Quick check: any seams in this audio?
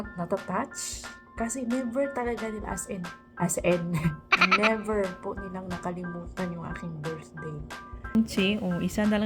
yes; 1 cut; at 8.2 s

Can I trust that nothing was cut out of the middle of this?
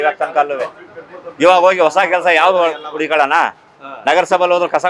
yes; 0 cuts

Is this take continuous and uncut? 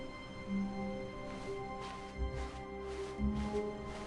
yes; 0 cuts

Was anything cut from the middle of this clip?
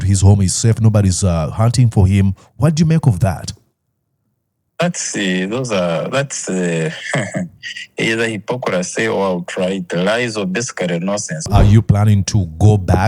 yes; 1 cut; at 11.5 s

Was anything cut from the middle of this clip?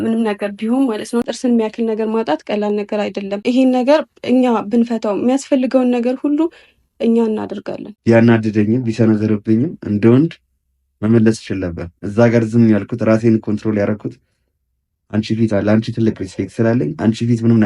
yes; 3 cuts; at 1.2 s, 3.4 s, 7.8 s

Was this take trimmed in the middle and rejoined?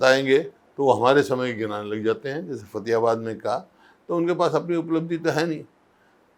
no; 0 cuts

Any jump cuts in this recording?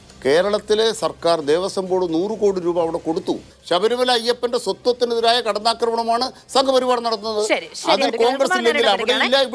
yes; 1 cut; at 3.5 s

